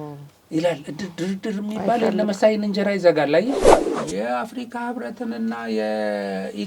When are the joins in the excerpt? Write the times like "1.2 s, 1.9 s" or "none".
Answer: 3.9 s